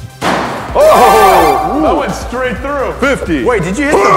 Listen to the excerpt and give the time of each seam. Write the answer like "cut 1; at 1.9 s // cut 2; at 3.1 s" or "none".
none